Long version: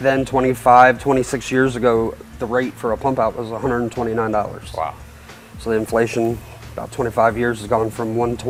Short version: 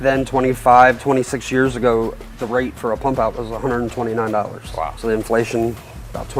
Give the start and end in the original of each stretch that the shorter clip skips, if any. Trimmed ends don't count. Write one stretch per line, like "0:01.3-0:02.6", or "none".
0:04.9-0:05.6